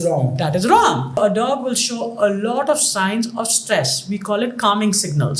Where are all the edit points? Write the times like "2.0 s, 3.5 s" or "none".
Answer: 1.2 s